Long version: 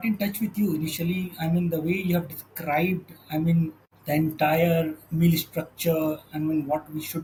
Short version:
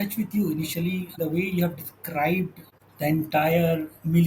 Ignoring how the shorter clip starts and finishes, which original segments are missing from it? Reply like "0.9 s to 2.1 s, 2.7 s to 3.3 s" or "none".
1.4 s to 1.7 s, 3.2 s to 3.8 s